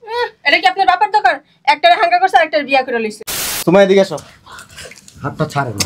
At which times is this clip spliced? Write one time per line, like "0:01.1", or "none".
0:03.5